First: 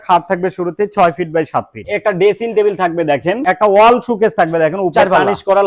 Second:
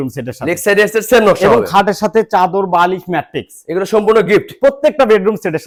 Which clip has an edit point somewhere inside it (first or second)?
first